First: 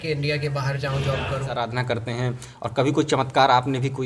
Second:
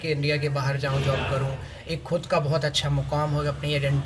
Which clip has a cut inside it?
first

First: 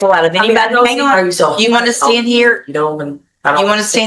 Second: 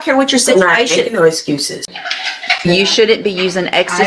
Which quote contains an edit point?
second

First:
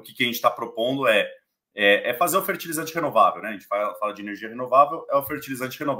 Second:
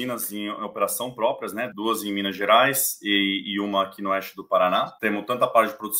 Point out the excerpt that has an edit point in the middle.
second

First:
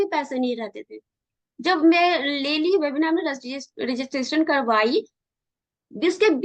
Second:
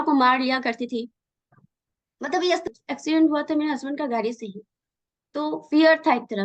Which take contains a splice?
second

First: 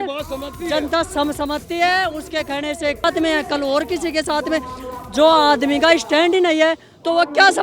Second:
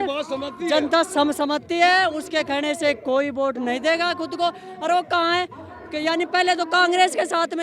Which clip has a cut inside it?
first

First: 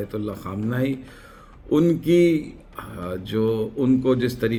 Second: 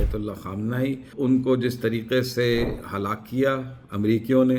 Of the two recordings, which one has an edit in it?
second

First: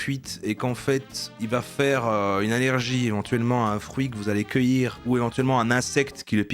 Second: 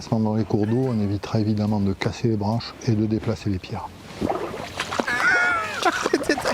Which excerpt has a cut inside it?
first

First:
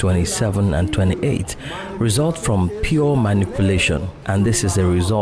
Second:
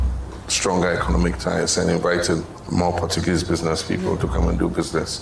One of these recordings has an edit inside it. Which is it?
second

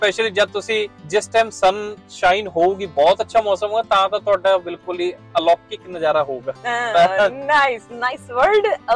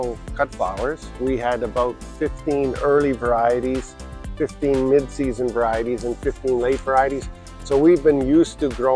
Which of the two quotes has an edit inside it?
first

